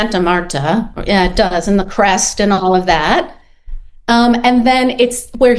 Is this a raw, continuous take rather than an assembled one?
yes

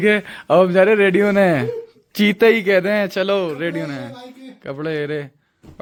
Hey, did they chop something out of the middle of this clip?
no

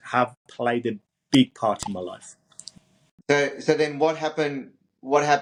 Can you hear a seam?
no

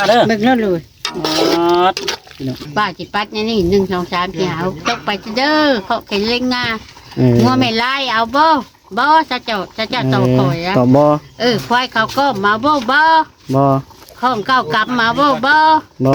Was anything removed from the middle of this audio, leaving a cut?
yes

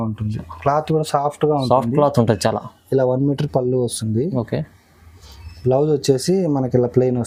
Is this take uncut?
yes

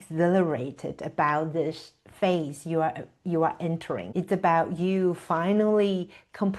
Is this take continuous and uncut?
no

